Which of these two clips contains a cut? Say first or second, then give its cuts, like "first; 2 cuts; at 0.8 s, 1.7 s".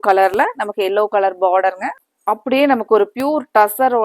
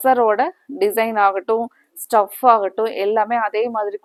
first; 1 cut; at 1.9 s